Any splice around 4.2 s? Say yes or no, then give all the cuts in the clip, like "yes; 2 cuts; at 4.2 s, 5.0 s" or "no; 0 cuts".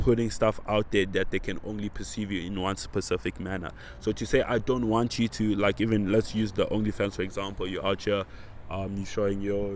no; 0 cuts